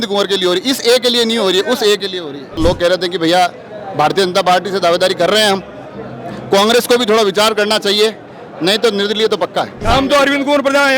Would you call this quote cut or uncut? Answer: cut